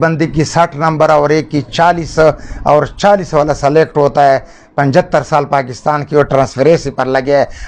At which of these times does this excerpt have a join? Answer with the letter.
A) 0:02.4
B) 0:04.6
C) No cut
C